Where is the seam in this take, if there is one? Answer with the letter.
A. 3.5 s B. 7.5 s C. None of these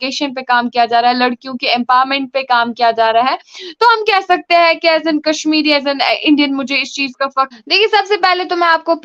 B